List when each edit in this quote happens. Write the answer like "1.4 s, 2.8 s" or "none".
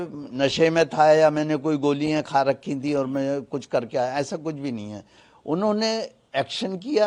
none